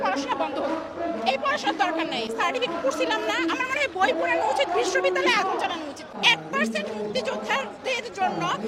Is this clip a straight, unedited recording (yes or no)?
yes